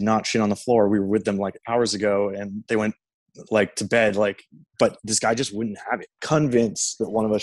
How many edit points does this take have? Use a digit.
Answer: 1